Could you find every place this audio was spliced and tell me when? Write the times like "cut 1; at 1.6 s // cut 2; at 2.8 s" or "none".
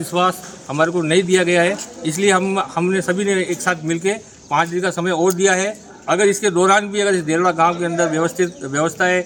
none